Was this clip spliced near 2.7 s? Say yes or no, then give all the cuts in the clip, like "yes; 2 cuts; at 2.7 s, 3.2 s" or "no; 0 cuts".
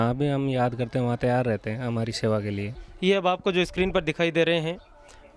yes; 1 cut; at 2.7 s